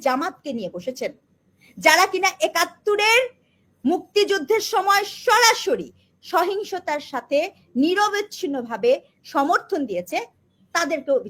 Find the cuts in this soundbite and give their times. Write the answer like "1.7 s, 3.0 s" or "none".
none

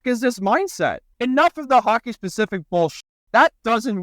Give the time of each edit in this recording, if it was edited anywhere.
1.1 s, 3.1 s

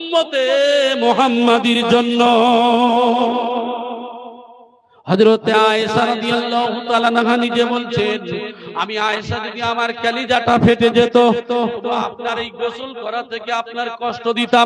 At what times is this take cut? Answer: none

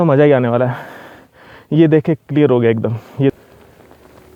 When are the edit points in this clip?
none

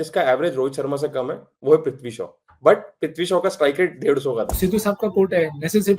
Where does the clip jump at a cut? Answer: 4.5 s

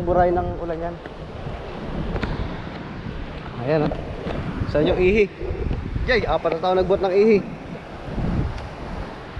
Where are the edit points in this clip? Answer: none

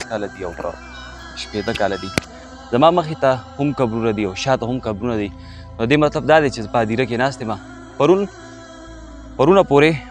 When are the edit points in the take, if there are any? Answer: 2.4 s

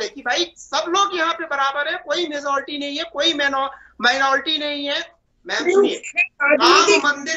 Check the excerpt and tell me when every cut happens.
5.2 s

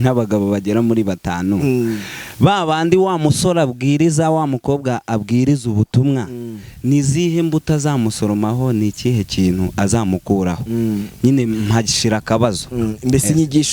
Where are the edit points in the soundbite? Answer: none

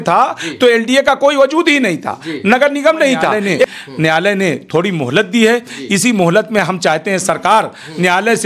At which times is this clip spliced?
3.6 s

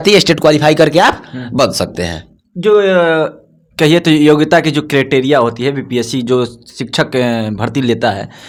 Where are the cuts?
none

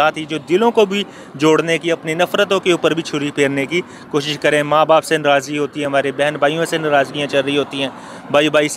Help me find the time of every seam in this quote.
none

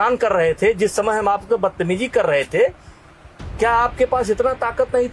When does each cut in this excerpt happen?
none

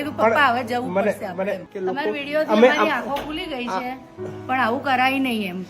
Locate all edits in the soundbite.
1.6 s

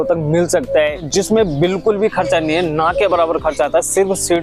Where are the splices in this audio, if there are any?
1.1 s

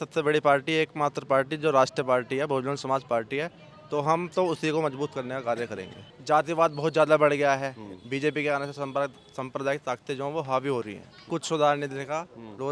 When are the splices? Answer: 6.1 s, 11.3 s

